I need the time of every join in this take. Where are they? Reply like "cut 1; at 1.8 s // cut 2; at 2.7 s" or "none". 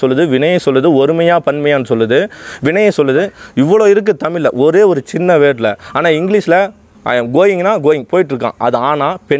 none